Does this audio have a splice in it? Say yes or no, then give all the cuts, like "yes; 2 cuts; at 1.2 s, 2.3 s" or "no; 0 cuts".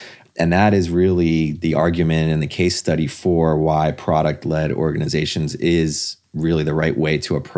yes; 1 cut; at 1.5 s